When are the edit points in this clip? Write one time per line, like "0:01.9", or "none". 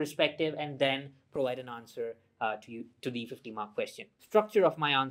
0:04.1